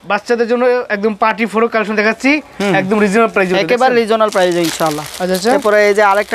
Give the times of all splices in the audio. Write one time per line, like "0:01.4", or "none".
none